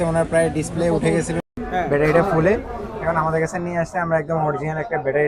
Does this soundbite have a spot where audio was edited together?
no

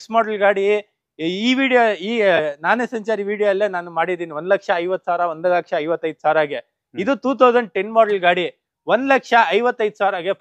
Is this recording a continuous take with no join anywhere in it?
yes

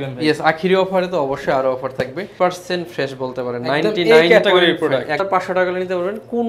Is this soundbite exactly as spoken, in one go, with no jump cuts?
no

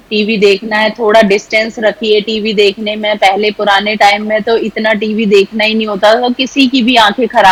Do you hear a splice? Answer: no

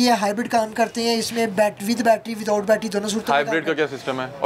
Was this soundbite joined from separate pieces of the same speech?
no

